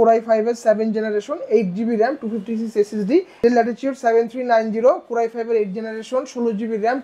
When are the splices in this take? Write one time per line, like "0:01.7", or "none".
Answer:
0:03.3